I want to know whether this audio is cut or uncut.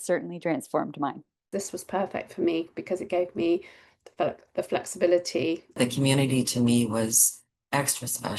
cut